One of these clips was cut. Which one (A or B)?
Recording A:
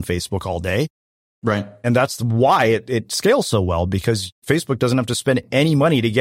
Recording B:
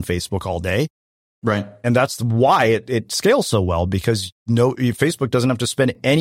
A